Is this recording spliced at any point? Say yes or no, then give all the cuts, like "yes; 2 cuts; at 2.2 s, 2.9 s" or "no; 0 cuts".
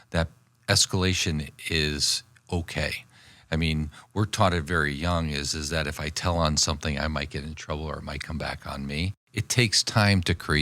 yes; 1 cut; at 9.2 s